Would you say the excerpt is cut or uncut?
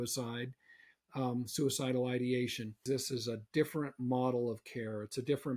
cut